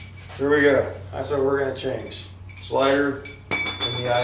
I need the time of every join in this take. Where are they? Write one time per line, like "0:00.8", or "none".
0:02.5